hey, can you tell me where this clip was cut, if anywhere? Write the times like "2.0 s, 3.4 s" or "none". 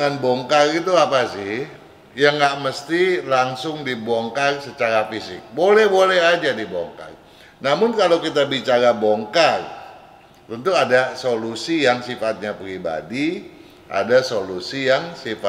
none